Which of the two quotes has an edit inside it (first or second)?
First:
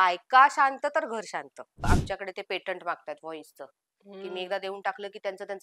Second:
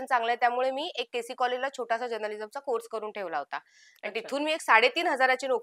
first